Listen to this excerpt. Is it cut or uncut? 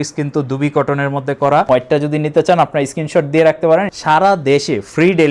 cut